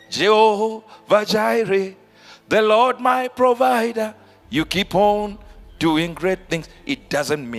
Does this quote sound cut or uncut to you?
uncut